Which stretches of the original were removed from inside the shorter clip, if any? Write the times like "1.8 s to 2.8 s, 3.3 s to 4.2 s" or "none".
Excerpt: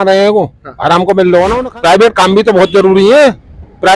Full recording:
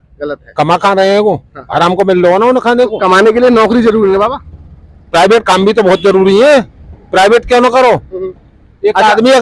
2.5 s to 4.9 s